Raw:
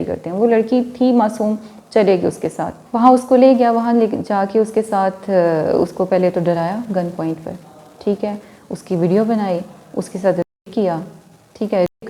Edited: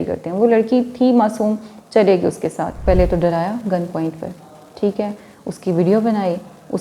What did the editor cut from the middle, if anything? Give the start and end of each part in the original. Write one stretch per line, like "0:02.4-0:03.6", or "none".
0:02.8-0:06.0